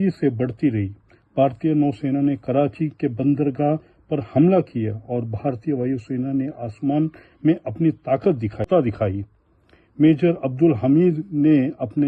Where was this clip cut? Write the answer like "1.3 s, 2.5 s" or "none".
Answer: 8.7 s